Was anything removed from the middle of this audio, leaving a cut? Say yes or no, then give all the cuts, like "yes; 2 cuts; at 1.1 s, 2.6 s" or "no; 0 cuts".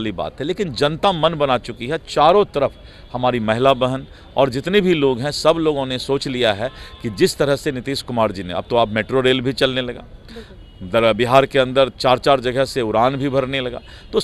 no; 0 cuts